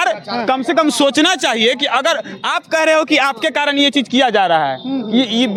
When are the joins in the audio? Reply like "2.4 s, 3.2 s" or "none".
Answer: none

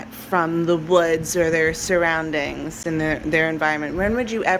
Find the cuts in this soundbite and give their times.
none

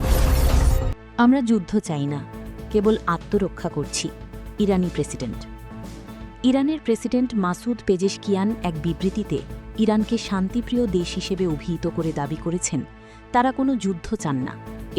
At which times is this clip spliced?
1.2 s

